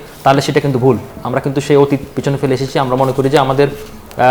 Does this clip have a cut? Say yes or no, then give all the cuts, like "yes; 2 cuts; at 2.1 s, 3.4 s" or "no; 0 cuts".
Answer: no; 0 cuts